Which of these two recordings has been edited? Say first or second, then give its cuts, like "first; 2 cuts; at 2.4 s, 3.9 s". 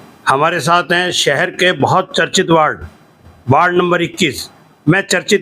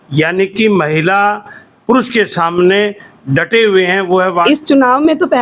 second; 1 cut; at 4.5 s